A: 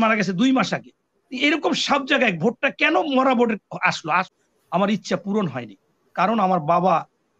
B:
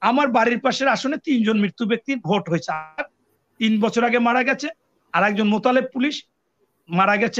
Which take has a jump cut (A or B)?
A